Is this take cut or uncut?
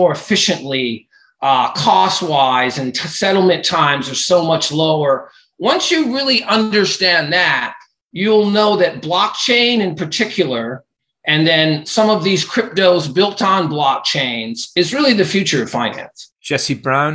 uncut